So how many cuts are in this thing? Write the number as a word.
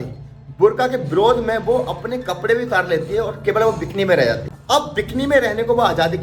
zero